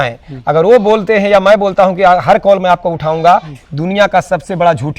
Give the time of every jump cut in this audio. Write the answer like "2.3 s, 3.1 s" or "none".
none